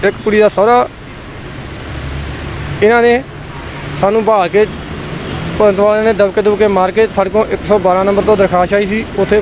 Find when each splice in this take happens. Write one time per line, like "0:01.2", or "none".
none

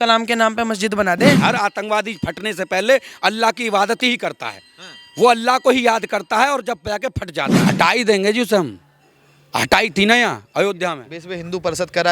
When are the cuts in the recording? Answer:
0:01.4
0:07.6

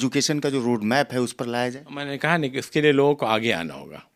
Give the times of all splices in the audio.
none

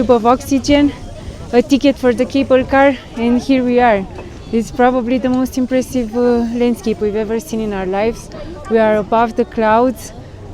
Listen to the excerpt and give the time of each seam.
none

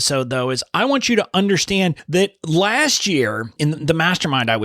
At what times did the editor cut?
0:02.0
0:03.5

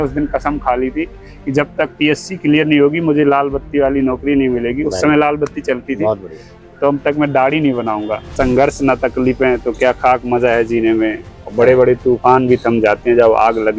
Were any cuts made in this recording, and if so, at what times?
0:08.3

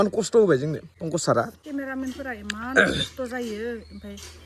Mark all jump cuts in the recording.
0:00.9
0:01.6

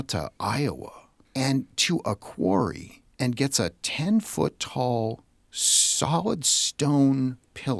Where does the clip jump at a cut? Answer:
none

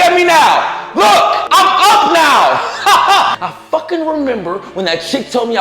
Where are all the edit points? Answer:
0:01.4
0:03.4

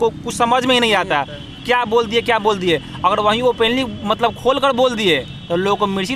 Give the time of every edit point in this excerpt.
none

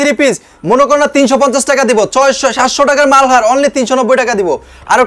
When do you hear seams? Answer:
none

